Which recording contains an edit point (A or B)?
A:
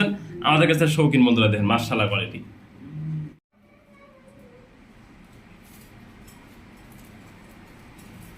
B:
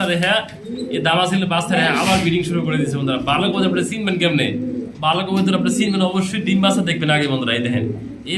A